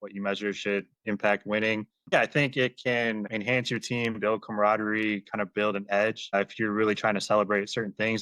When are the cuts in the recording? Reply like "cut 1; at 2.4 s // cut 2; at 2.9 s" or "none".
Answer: cut 1; at 2.1 s